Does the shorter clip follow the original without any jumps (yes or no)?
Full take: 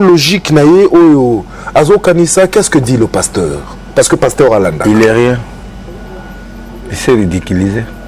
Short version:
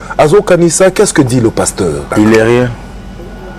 no